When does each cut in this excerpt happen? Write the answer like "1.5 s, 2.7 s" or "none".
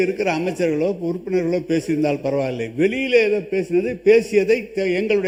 none